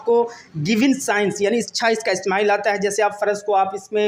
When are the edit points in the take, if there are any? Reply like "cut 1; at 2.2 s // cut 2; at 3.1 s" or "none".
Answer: none